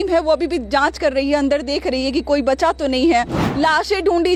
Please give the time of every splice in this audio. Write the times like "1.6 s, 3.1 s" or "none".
none

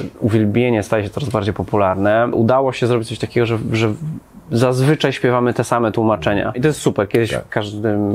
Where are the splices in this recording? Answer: 2.3 s, 6.6 s

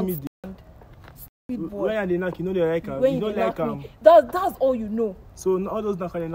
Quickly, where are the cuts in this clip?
5.3 s

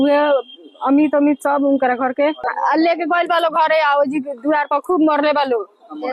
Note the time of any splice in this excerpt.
2.4 s

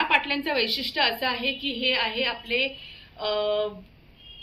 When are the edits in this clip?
none

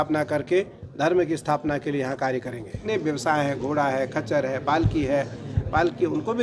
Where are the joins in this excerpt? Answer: 2.8 s

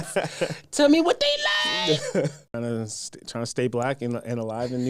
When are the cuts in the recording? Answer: 2.5 s

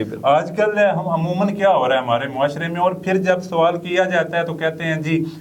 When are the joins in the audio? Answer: none

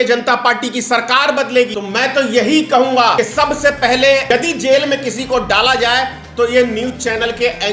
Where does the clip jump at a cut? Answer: 1.8 s, 3.1 s, 4.2 s

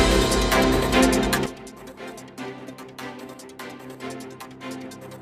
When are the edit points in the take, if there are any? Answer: 1.4 s

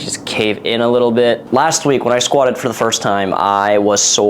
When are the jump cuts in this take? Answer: 1.4 s

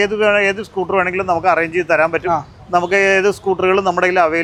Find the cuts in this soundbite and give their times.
none

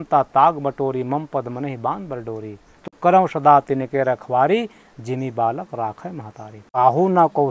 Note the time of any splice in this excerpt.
6.6 s

